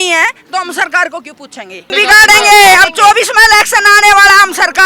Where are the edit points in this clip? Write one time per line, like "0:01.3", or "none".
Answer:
0:01.9